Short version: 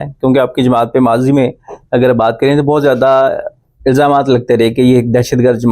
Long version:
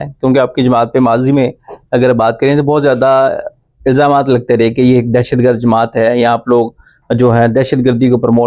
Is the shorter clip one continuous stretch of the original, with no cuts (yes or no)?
yes